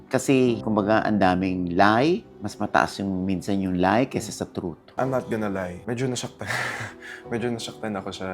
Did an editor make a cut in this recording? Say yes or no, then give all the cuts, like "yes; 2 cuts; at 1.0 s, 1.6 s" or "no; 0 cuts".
yes; 1 cut; at 4.9 s